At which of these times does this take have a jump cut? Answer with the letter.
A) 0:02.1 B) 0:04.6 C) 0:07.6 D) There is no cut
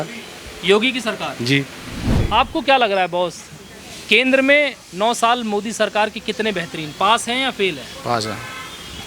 A